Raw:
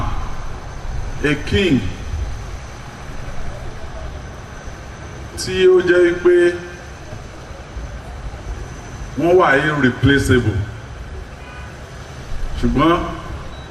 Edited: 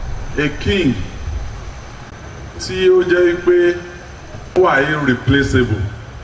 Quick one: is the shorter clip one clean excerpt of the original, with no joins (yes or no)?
no